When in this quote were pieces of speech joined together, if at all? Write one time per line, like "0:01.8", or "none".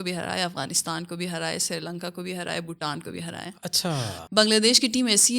0:04.2